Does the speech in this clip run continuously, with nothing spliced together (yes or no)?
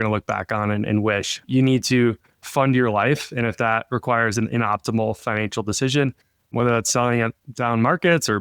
yes